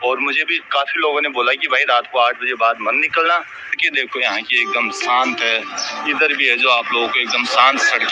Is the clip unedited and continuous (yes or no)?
no